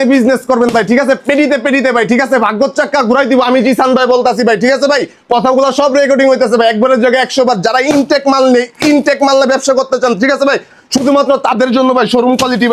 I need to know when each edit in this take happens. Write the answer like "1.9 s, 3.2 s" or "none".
none